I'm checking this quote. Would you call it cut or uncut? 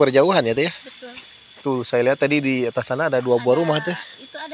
uncut